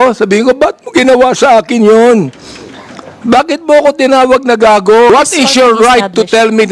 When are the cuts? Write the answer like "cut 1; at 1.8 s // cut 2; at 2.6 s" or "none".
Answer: cut 1; at 5.1 s